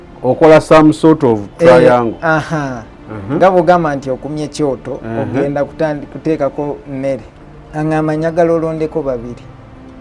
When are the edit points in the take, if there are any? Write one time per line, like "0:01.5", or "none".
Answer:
0:07.3

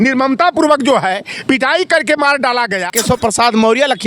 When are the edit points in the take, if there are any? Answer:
0:02.9

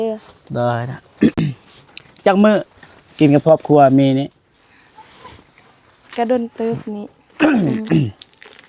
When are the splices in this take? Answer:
none

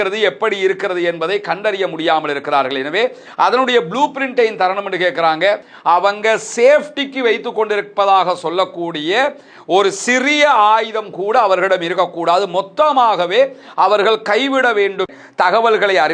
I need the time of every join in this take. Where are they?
0:05.7
0:15.2

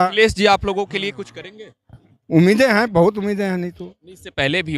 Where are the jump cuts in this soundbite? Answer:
none

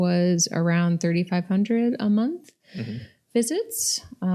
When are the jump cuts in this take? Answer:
none

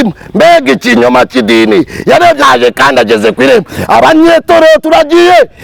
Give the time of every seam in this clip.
0:02.4

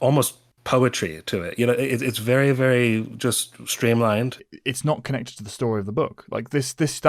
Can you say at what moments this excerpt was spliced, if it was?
0:04.4

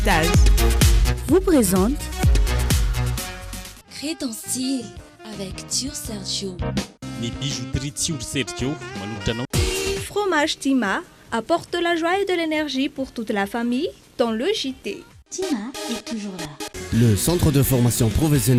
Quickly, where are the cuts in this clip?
none

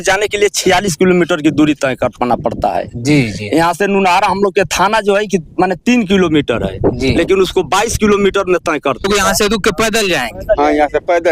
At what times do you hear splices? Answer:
0:09.0

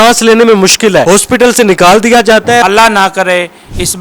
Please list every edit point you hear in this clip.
0:01.0
0:02.6

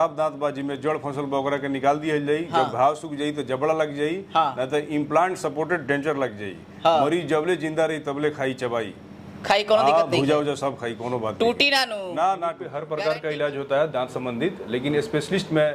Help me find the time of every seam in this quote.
0:12.8

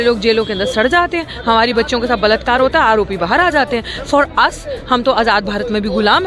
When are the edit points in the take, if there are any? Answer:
none

